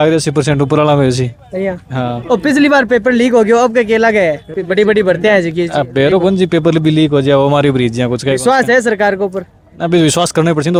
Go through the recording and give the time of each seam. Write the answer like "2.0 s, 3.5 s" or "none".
none